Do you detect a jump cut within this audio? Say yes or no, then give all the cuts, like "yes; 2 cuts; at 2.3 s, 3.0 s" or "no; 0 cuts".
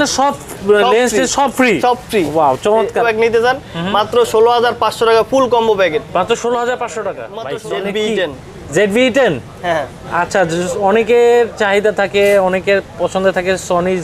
yes; 2 cuts; at 3.0 s, 7.3 s